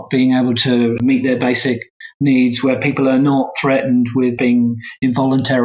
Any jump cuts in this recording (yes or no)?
yes